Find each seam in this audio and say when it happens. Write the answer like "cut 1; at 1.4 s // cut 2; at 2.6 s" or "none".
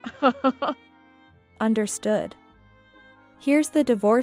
cut 1; at 0.9 s

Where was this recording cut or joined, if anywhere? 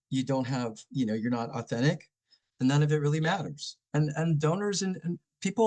none

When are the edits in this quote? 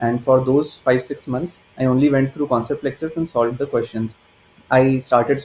cut 1; at 4.1 s

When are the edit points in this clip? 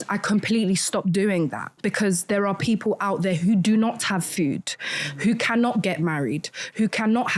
cut 1; at 1.7 s

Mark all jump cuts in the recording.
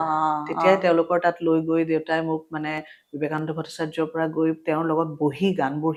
none

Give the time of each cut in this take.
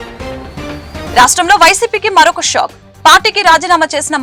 none

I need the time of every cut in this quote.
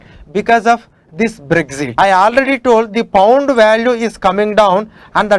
cut 1; at 1.8 s

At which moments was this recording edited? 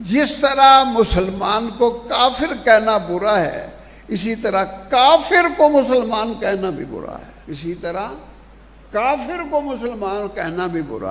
none

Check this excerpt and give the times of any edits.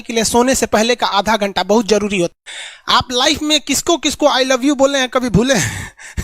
cut 1; at 2.3 s

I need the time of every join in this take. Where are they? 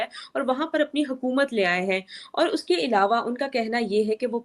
none

